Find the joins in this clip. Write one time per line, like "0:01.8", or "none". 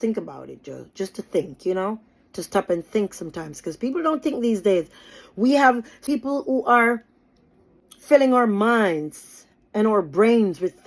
none

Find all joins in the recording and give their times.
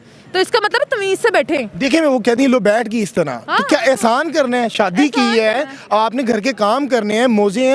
none

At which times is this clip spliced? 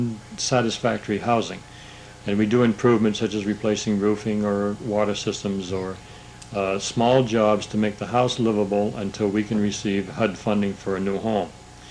0:10.3

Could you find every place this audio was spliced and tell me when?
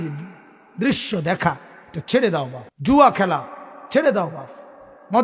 0:02.9

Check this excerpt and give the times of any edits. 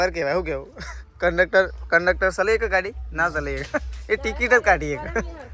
none

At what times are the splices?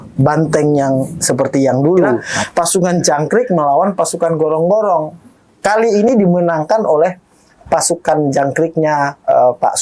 0:02.3

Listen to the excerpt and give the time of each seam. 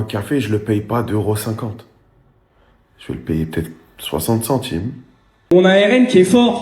0:05.4

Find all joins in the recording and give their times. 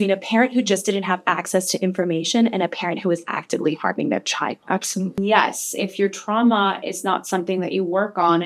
0:05.2

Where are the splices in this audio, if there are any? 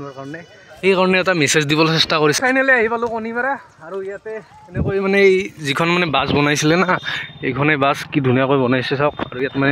0:02.4

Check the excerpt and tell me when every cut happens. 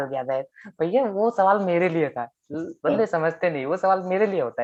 none

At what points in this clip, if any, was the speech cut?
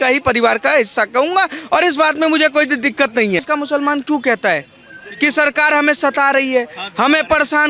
0:03.5

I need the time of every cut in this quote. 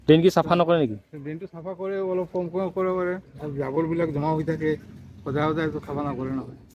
none

